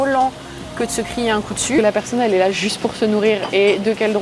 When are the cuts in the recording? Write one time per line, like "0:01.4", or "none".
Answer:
0:01.8